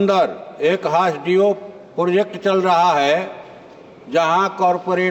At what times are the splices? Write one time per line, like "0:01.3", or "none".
none